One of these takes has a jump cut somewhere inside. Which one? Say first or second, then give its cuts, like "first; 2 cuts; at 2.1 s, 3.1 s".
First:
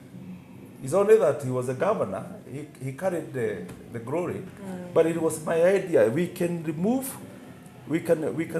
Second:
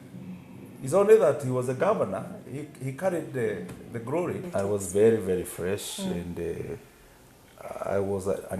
second; 1 cut; at 4.5 s